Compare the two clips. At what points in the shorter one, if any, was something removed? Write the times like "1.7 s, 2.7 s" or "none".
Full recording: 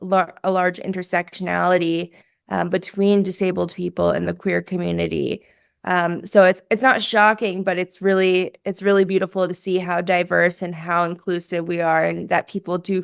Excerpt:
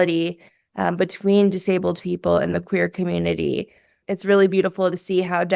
4.0 s